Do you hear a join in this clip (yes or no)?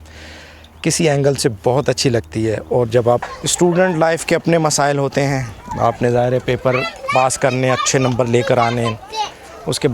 yes